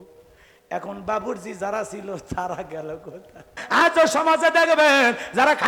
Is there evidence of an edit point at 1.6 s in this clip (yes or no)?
no